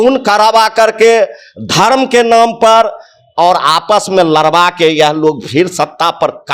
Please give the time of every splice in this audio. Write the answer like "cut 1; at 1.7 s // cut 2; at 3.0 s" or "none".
none